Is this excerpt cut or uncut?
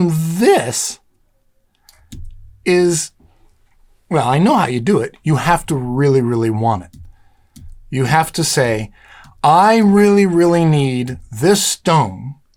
uncut